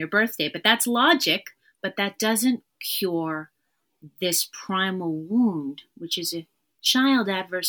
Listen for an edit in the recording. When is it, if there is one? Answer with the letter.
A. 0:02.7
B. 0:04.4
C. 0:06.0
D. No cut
D